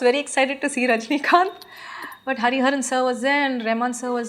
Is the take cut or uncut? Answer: uncut